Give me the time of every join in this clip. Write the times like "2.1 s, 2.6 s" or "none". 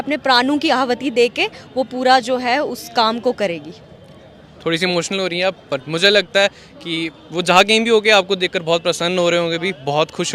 none